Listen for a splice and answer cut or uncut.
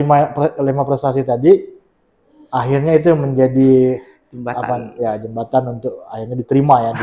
uncut